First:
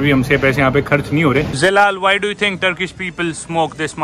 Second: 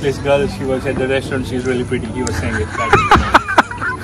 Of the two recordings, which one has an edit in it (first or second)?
first